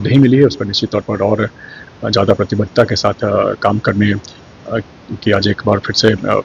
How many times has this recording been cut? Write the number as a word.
zero